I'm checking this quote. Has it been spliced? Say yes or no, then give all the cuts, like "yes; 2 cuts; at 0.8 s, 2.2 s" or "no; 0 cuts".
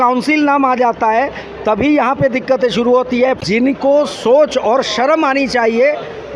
yes; 1 cut; at 3.4 s